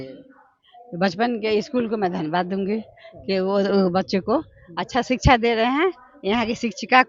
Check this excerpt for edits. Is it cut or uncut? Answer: uncut